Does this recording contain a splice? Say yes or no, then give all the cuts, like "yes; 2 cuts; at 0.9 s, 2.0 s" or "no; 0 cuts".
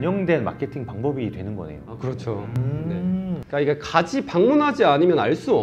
no; 0 cuts